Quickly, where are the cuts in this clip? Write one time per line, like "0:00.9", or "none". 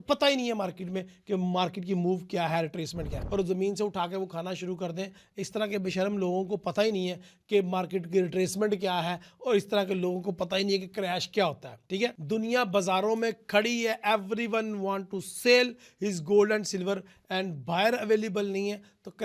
0:03.1